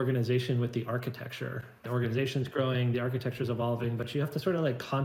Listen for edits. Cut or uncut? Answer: cut